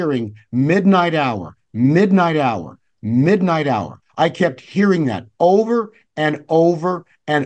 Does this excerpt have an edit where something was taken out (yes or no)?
no